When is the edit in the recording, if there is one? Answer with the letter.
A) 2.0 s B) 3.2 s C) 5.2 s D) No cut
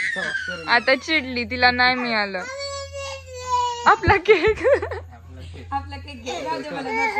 D